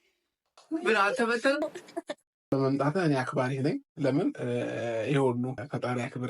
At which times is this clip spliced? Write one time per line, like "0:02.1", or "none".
0:01.6

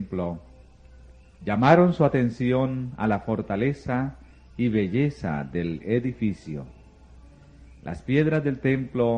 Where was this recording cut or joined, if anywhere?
0:02.9

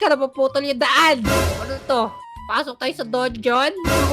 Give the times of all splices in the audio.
0:01.4

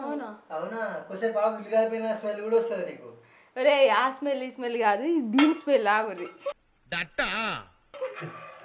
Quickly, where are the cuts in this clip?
none

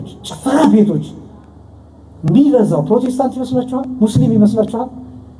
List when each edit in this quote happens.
none

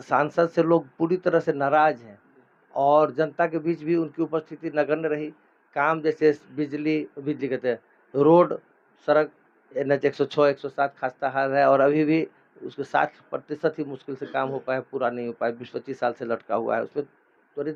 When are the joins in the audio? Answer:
none

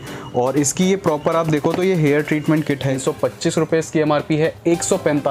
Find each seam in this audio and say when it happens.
0:03.0

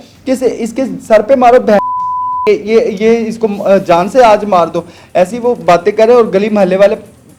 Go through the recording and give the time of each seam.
none

